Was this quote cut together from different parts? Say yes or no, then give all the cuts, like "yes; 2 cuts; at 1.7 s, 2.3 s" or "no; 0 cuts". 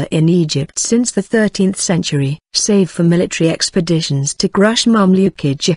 yes; 1 cut; at 3.1 s